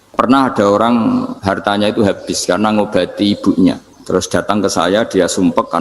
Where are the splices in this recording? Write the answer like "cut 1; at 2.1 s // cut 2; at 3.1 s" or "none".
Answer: cut 1; at 1.3 s // cut 2; at 3.9 s